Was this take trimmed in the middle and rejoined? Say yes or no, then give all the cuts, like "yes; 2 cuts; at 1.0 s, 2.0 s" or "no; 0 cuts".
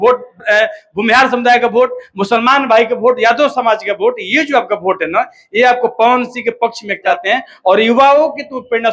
yes; 1 cut; at 7.1 s